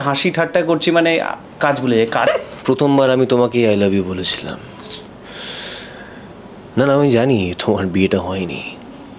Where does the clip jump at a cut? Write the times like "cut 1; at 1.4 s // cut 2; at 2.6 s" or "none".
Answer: cut 1; at 2.3 s